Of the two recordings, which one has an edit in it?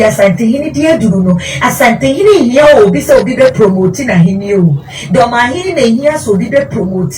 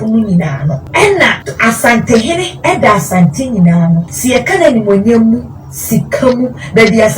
second; 3 cuts; at 0.8 s, 1.5 s, 4.1 s

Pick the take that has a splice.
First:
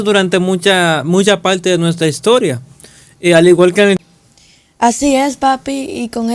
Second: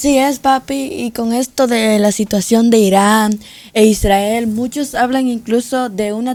first; 1 cut; at 4.0 s

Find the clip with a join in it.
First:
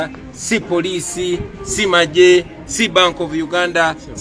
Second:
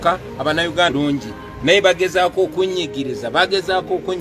second; 1 cut; at 0.9 s

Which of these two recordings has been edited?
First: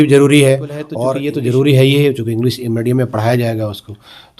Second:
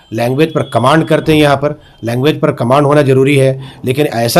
first; 1 cut; at 0.9 s

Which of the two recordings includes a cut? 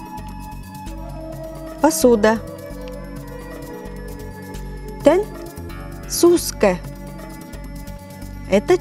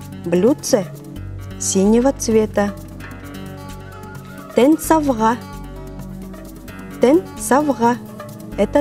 second; 4 cuts; at 2.7 s, 4.1 s, 5.4 s, 6.9 s

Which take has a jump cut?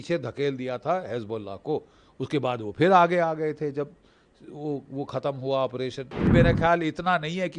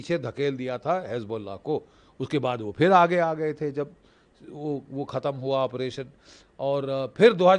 first; 1 cut; at 6.3 s

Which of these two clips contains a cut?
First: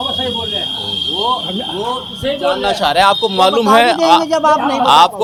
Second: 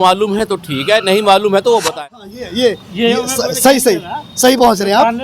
second; 1 cut; at 1.9 s

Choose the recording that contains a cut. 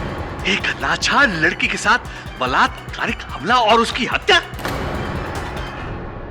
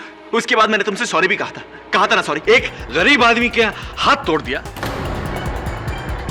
second; 1 cut; at 2.4 s

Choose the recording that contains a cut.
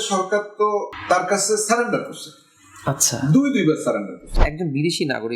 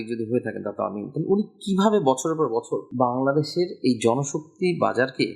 first; 2 cuts; at 0.9 s, 4.3 s

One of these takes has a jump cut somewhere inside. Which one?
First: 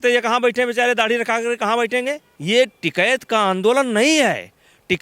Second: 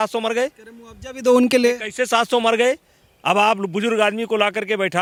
first; 1 cut; at 2.3 s

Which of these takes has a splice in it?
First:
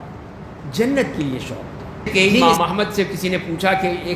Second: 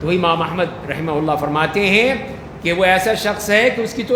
first; 1 cut; at 2.4 s

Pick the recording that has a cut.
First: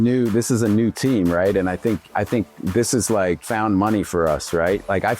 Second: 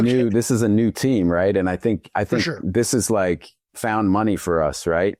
first; 1 cut; at 3.4 s

